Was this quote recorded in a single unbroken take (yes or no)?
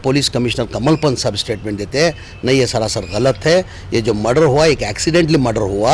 yes